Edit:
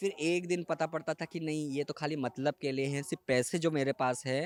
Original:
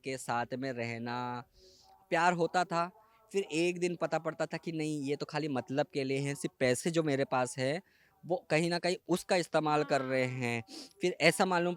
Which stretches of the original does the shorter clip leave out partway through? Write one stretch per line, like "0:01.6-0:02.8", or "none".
none